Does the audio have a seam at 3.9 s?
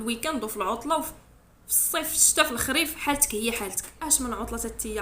yes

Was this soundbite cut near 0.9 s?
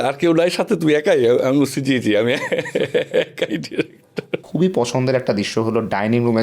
no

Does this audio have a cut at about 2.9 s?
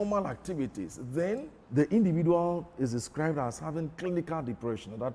no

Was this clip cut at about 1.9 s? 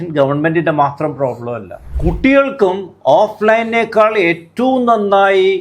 yes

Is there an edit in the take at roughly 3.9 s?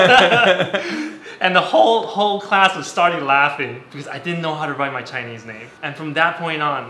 yes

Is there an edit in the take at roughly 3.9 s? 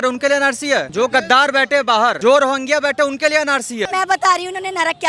yes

